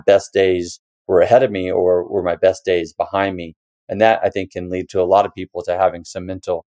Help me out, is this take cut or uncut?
uncut